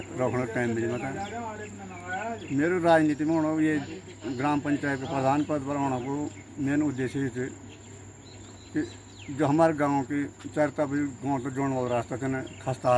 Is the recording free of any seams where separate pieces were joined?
yes; 0 cuts

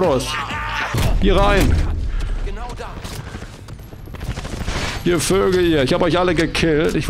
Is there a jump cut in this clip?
yes; 1 cut; at 1.0 s

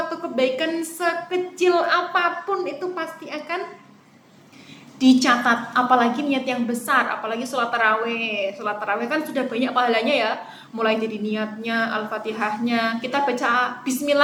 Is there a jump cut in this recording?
no; 0 cuts

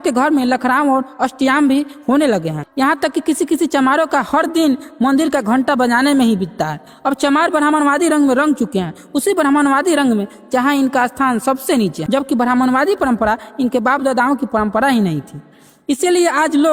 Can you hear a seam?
no; 0 cuts

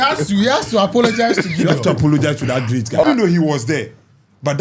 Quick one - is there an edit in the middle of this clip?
yes; 1 cut; at 3.0 s

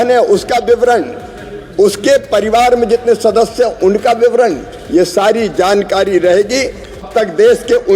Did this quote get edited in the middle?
yes; 1 cut; at 7.0 s

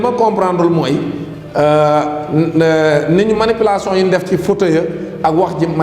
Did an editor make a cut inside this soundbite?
no; 0 cuts

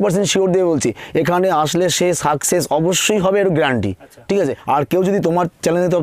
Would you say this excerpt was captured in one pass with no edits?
no; 1 cut; at 4.6 s

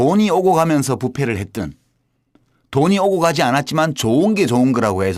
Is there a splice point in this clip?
yes; 1 cut; at 1.6 s

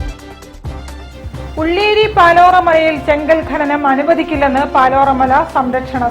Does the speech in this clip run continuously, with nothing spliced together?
yes; 0 cuts

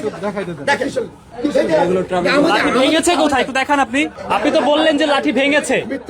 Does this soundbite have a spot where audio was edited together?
yes; 2 cuts; at 1.2 s, 4.2 s

